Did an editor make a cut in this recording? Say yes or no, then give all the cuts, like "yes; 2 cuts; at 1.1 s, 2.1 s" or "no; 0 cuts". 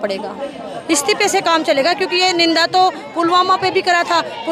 no; 0 cuts